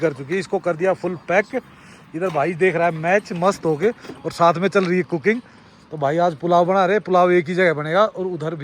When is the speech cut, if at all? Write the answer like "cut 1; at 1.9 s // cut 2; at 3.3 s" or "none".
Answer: none